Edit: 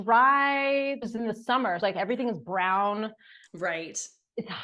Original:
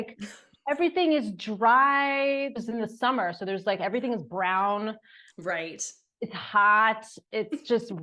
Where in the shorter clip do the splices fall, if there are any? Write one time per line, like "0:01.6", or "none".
0:01.8